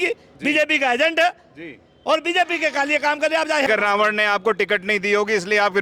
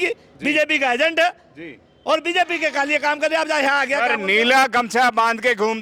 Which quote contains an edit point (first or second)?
first